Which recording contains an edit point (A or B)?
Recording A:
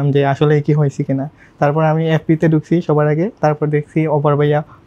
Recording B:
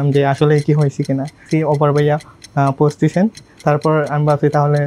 B